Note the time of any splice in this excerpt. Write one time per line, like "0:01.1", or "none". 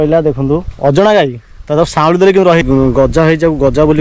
0:02.6